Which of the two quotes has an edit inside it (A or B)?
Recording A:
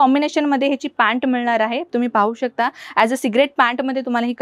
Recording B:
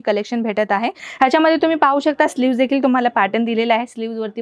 B